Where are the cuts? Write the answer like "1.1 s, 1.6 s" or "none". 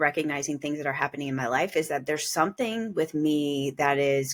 none

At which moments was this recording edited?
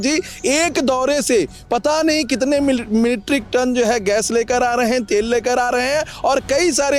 none

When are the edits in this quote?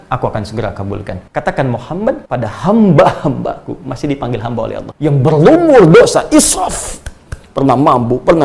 1.2 s, 2.3 s, 4.9 s

